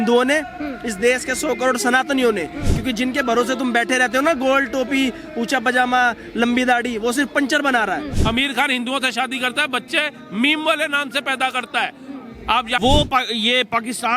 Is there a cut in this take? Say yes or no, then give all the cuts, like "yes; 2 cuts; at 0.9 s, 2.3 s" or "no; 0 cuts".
yes; 2 cuts; at 8.1 s, 12.8 s